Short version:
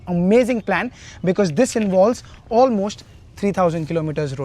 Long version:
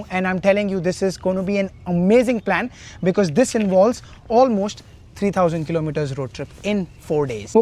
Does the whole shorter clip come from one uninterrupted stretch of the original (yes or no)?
yes